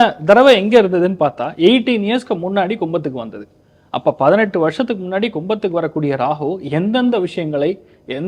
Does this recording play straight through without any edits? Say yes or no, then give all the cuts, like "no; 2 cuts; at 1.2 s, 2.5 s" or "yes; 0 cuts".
yes; 0 cuts